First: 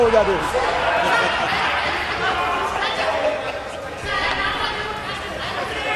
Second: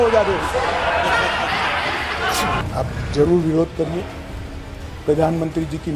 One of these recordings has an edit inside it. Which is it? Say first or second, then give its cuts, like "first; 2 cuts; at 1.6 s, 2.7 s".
second; 1 cut; at 2.6 s